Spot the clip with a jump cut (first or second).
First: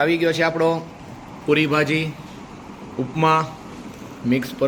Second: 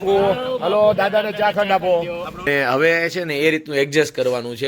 second